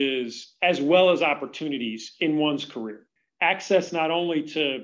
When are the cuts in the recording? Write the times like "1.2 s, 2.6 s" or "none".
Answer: 3.2 s